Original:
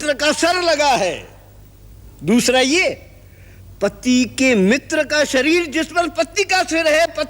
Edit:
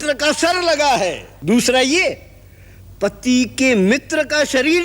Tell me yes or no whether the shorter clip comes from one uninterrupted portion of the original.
no